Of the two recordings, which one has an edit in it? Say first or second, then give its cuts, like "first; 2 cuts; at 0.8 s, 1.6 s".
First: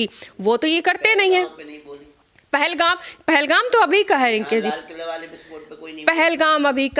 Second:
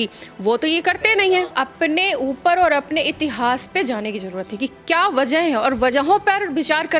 second; 1 cut; at 1.5 s